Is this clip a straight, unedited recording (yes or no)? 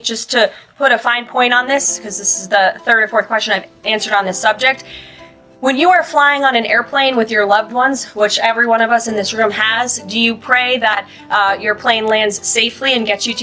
yes